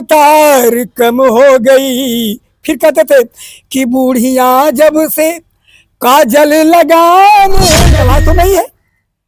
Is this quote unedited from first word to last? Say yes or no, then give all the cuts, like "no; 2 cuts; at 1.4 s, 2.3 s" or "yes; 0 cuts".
no; 1 cut; at 7.9 s